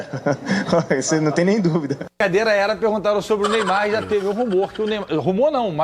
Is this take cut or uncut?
cut